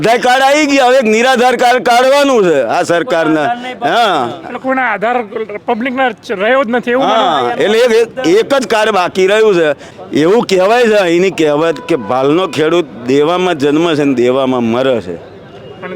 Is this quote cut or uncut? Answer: cut